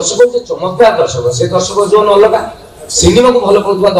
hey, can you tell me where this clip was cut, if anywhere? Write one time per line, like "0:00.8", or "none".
none